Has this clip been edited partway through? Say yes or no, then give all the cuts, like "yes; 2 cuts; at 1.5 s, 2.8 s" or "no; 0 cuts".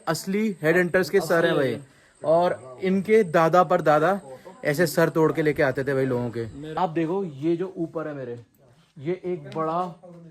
yes; 1 cut; at 6.6 s